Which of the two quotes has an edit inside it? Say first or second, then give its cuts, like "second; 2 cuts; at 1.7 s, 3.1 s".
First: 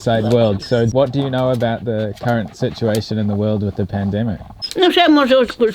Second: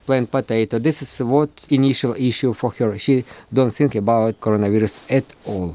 second; 2 cuts; at 1.6 s, 4.4 s